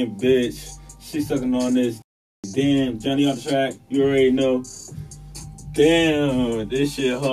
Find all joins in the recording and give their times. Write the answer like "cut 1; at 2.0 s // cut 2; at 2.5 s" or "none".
none